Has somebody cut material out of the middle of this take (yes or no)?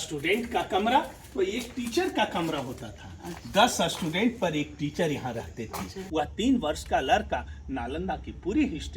yes